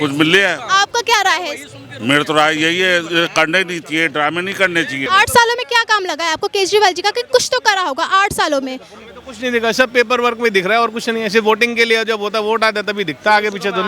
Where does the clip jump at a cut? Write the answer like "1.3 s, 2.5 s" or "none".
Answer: 5.0 s